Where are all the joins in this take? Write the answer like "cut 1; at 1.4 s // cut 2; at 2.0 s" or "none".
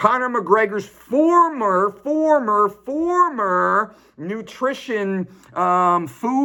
none